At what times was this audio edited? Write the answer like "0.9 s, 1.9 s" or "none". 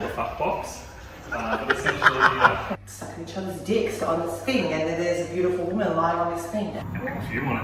2.9 s, 6.8 s